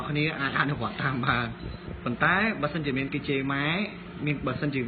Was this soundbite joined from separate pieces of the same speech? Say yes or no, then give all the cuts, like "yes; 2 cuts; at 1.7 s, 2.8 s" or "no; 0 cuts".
yes; 1 cut; at 1.3 s